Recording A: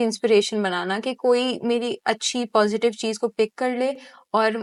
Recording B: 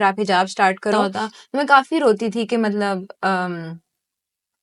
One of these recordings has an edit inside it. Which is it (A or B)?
B